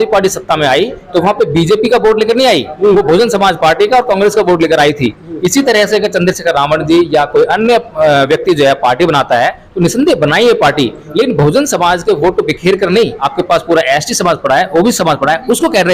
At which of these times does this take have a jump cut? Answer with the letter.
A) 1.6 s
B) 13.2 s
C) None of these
B